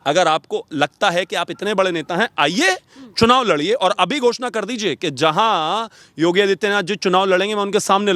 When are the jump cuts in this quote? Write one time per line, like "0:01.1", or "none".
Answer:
none